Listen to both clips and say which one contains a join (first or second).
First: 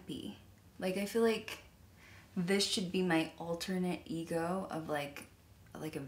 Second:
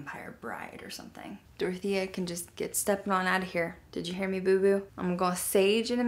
second